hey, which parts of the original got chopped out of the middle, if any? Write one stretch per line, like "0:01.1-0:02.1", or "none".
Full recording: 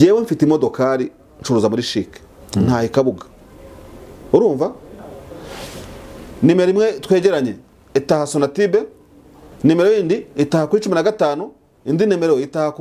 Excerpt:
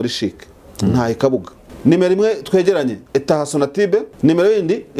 0:03.3-0:06.2
0:07.6-0:07.8
0:08.9-0:09.5